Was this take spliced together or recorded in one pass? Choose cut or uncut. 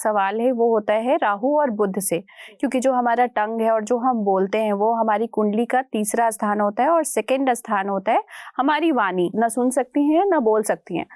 cut